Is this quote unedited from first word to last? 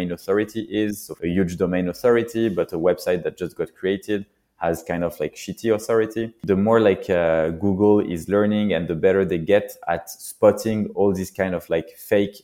no; 2 cuts; at 1.1 s, 6.4 s

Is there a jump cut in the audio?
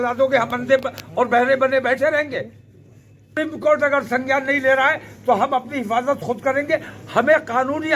yes; 1 cut; at 3.3 s

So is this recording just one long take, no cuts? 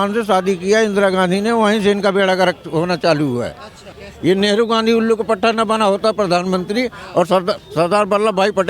no; 1 cut; at 4.0 s

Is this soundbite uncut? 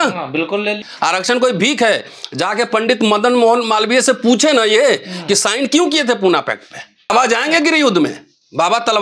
no; 2 cuts; at 0.9 s, 7.1 s

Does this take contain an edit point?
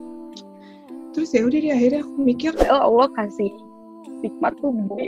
yes; 1 cut; at 2.6 s

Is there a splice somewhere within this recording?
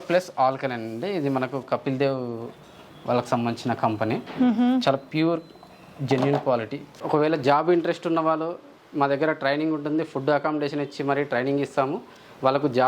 yes; 1 cut; at 7.0 s

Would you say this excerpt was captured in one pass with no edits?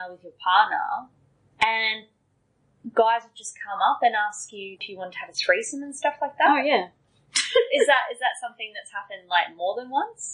no; 1 cut; at 4.9 s

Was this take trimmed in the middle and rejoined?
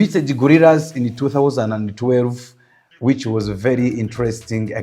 no; 0 cuts

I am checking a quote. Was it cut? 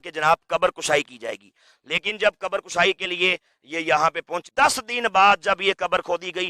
yes; 1 cut; at 4.4 s

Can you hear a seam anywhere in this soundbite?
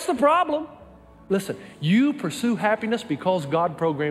yes; 1 cut; at 1.1 s

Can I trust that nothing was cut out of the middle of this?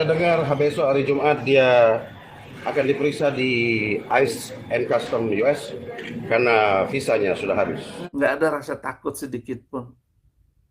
no; 1 cut; at 7.9 s

